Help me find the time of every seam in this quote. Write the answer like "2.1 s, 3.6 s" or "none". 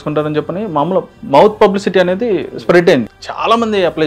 3.1 s